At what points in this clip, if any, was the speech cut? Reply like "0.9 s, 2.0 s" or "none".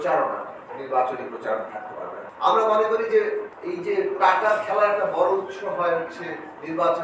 2.1 s